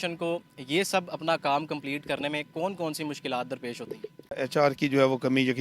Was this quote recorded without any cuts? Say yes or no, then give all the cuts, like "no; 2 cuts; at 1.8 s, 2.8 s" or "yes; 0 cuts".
no; 1 cut; at 4.3 s